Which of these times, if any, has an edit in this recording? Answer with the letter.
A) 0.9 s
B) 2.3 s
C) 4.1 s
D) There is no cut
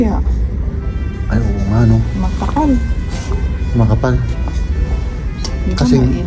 D